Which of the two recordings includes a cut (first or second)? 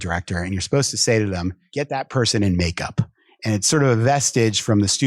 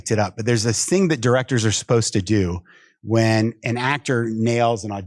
first